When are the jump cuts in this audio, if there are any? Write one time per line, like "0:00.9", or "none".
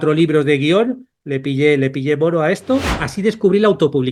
0:03.0